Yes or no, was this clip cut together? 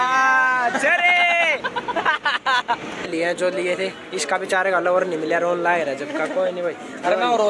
yes